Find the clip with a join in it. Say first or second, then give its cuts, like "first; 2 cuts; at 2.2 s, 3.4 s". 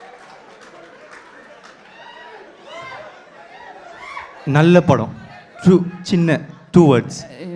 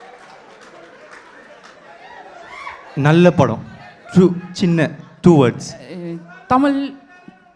second; 1 cut; at 1.8 s